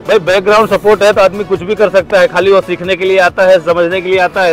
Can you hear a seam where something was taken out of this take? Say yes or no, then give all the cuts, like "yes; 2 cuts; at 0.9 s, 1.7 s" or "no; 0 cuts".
no; 0 cuts